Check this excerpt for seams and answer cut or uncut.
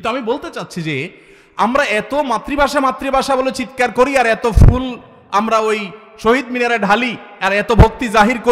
uncut